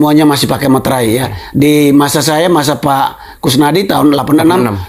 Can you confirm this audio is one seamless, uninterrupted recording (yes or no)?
yes